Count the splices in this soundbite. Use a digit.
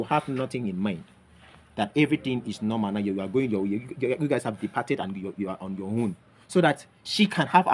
0